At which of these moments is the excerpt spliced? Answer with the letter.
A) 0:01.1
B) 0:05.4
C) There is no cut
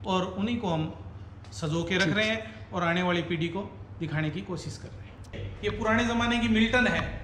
B